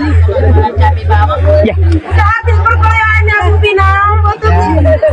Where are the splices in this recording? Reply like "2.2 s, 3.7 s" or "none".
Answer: none